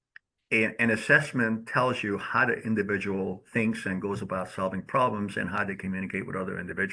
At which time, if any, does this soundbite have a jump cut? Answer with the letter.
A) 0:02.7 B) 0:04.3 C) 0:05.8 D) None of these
D